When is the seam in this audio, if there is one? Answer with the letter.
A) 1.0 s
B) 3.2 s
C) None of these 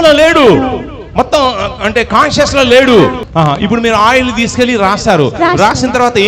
B